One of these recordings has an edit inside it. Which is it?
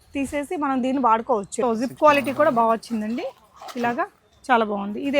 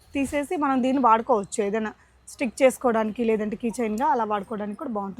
first; 1 cut; at 1.5 s

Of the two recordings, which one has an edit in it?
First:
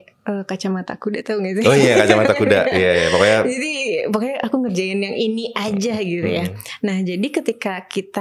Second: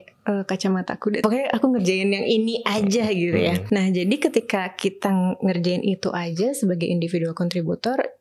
second; 2 cuts; at 1.2 s, 3.6 s

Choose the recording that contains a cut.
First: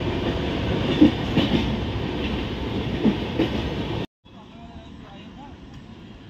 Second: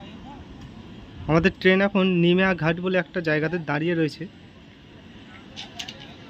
first; 1 cut; at 4.2 s

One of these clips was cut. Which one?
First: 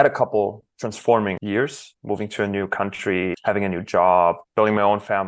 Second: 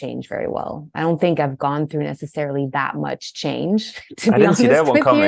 first; 3 cuts; at 1.7 s, 3.4 s, 4.4 s

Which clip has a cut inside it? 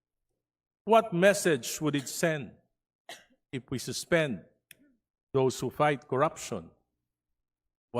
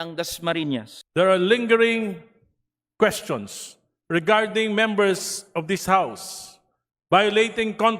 second; 1 cut; at 1.0 s

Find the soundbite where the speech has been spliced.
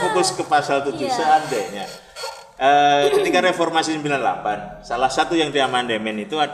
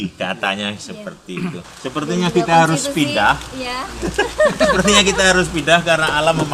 second; 1 cut; at 1.7 s

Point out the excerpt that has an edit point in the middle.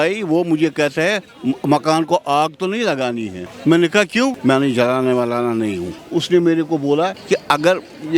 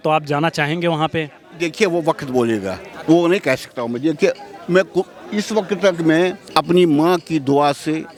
first; 3 cuts; at 4.4 s, 5.9 s, 7.2 s

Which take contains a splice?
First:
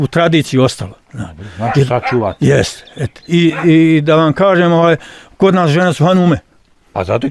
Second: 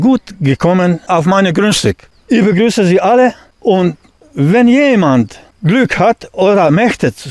second; 4 cuts; at 1.0 s, 2.1 s, 3.5 s, 5.4 s

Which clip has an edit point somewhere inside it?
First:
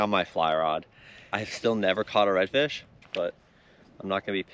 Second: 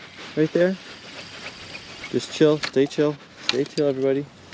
first; 2 cuts; at 1.4 s, 3.0 s

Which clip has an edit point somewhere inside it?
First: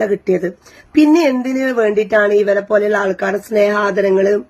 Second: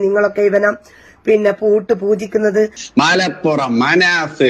second; 1 cut; at 2.8 s

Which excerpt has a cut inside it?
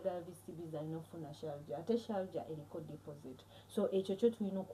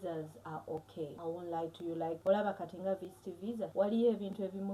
second; 3 cuts; at 1.1 s, 2.2 s, 3.7 s

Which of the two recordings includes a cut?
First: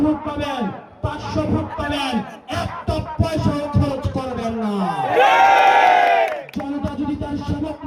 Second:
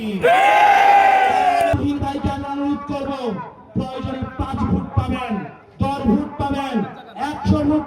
second; 1 cut; at 1.7 s

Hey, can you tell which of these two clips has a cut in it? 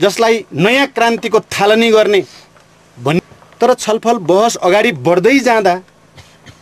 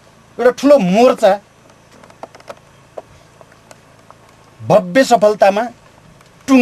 first; 1 cut; at 3.2 s

